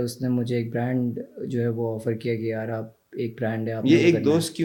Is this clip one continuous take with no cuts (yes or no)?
yes